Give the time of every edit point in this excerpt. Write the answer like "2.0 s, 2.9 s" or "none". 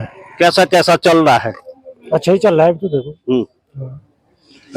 none